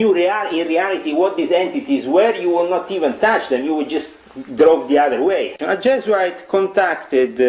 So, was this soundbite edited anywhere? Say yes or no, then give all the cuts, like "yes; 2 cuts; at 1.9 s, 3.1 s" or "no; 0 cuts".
yes; 1 cut; at 5.6 s